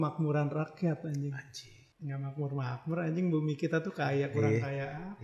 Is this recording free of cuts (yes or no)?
yes